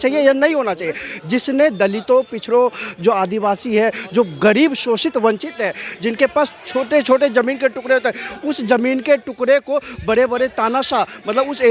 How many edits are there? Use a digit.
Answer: 0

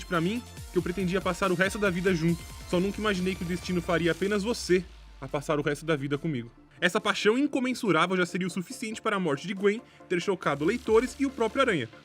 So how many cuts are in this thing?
1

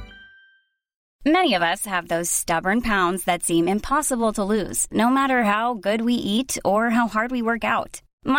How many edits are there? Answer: 1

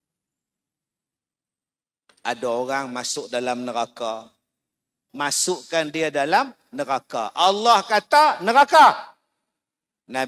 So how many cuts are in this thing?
1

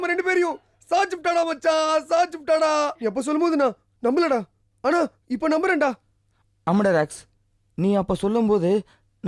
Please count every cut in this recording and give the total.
1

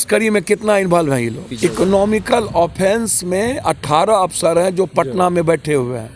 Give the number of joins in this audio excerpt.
1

